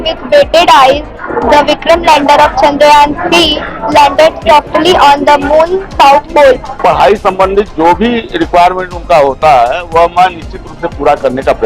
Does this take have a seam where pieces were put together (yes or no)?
yes